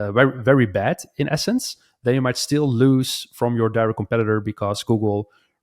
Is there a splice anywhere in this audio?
no; 0 cuts

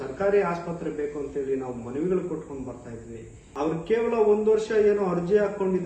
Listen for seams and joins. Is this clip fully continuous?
no; 1 cut; at 3.4 s

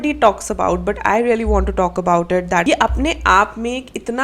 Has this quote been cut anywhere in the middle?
yes; 1 cut; at 2.6 s

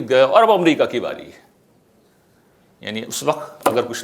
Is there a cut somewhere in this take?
no; 0 cuts

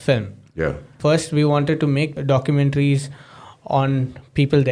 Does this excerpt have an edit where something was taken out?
yes; 2 cuts; at 0.9 s, 2.2 s

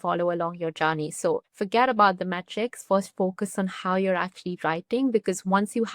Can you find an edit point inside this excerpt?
yes; 1 cut; at 1.5 s

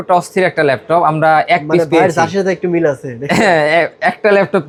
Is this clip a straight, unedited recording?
yes; 0 cuts

